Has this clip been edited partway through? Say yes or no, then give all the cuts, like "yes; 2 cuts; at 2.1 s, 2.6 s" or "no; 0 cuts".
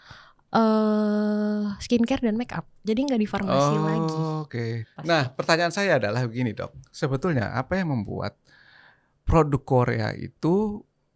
yes; 1 cut; at 4.8 s